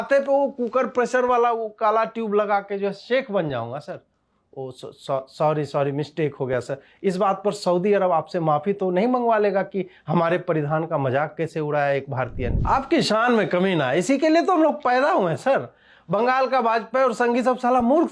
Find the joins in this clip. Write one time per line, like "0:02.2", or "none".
0:12.5